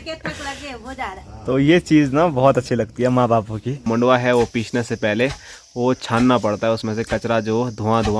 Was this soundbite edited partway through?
yes; 1 cut; at 3.8 s

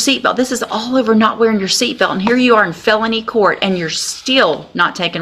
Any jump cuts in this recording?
no; 0 cuts

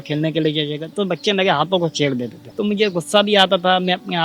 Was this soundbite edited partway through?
yes; 1 cut; at 2.4 s

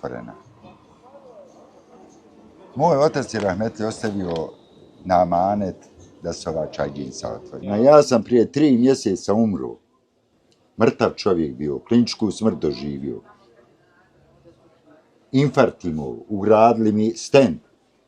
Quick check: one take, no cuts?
no; 1 cut; at 7.7 s

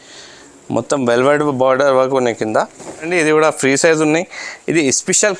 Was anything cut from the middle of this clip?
yes; 1 cut; at 3.0 s

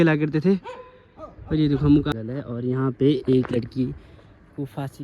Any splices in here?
yes; 1 cut; at 2.1 s

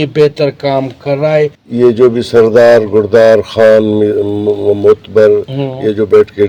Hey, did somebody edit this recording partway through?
yes; 1 cut; at 1.6 s

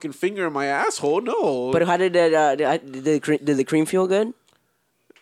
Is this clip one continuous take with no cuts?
yes; 0 cuts

